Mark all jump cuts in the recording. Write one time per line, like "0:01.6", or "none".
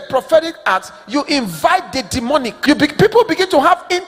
0:02.5